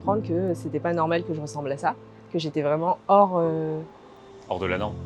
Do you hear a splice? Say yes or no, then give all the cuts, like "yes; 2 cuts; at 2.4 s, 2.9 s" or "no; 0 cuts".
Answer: no; 0 cuts